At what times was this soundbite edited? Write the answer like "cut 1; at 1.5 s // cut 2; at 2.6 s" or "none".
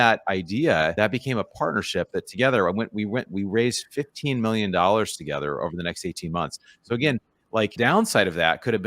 cut 1; at 0.9 s // cut 2; at 7.7 s